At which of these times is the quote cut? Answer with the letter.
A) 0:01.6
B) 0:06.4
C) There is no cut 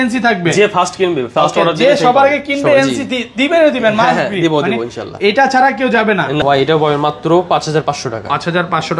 B